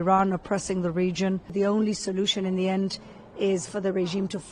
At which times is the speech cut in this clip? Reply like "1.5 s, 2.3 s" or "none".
1.5 s